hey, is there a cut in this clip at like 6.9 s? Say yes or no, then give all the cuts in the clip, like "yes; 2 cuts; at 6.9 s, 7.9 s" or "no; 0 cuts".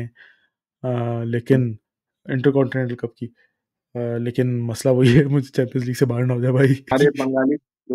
yes; 1 cut; at 6.9 s